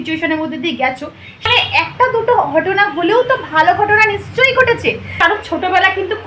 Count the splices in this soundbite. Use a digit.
2